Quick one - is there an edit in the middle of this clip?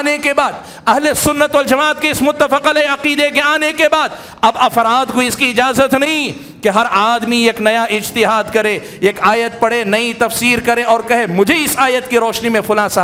no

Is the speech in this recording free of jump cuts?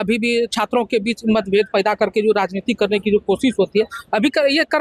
yes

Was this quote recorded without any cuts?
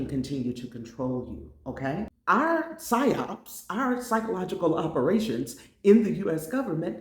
no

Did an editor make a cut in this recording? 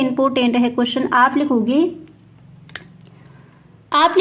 no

